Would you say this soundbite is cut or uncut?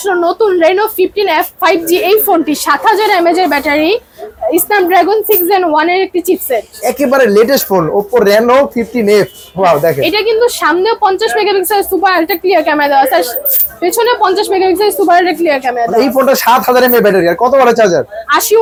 uncut